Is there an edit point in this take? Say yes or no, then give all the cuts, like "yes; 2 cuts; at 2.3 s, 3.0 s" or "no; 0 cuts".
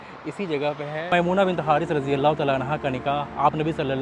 yes; 1 cut; at 1.0 s